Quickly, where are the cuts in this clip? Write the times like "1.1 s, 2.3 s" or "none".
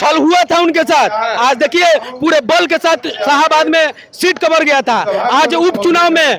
none